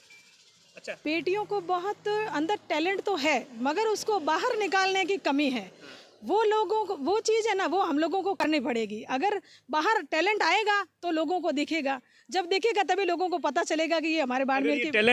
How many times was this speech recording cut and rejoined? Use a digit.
1